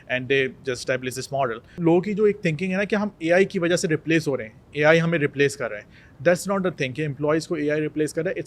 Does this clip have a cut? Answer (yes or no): yes